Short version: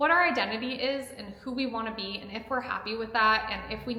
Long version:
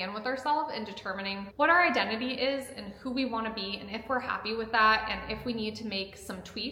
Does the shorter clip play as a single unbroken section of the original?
yes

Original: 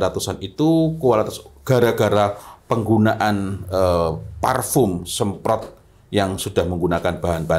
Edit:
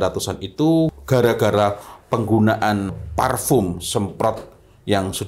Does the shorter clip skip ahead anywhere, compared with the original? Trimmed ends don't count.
yes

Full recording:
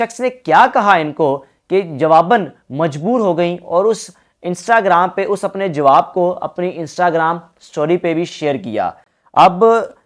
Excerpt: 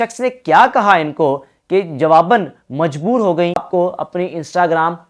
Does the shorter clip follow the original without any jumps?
no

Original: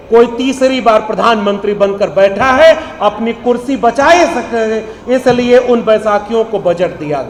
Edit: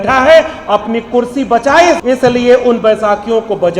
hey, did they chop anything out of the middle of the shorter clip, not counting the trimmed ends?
yes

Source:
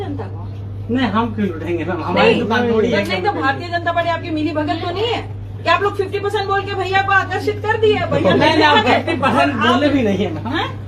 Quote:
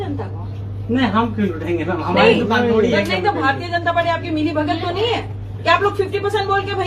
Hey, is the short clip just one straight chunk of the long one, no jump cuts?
yes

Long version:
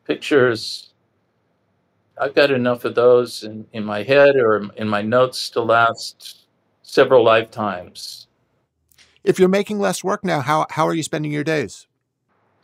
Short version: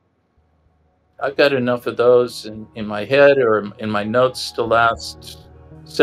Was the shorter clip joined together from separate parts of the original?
no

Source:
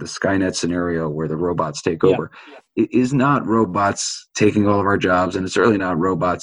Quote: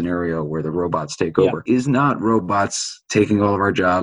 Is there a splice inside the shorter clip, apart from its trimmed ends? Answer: yes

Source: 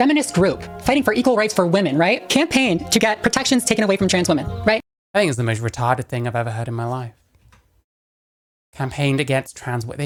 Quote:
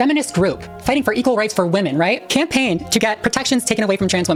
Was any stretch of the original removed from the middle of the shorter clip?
no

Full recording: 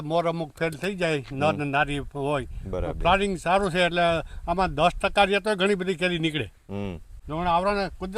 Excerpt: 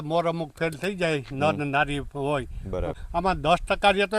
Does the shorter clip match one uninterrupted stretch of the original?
no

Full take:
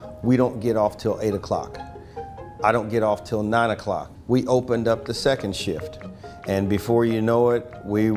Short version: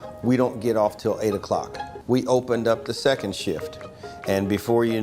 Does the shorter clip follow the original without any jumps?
no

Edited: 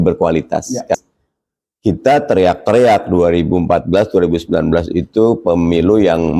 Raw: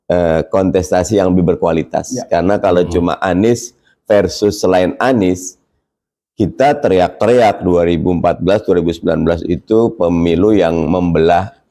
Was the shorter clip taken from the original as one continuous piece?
no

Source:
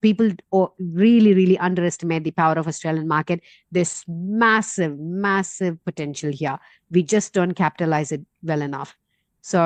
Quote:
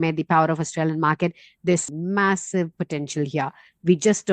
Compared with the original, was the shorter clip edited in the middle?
yes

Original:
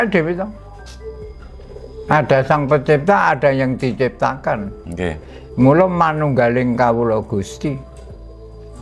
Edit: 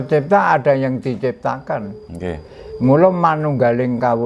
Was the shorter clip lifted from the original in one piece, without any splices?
yes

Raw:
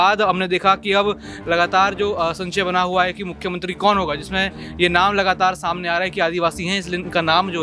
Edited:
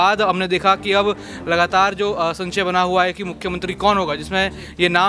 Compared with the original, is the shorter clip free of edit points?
yes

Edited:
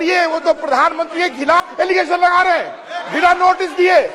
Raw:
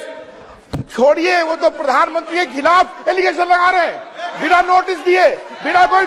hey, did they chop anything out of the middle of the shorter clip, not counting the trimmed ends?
yes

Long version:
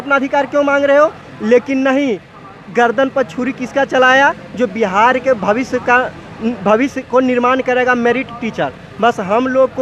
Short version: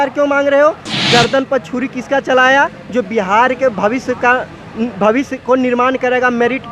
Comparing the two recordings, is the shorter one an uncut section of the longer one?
no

